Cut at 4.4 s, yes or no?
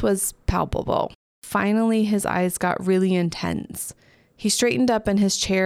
no